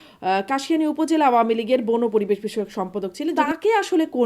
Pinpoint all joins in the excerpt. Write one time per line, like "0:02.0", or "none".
0:03.3